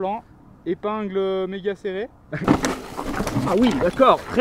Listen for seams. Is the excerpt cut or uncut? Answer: cut